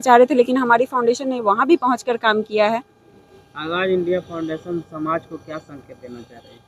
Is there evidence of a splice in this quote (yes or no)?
no